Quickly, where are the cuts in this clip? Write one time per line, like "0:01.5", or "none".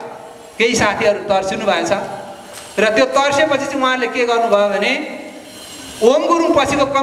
none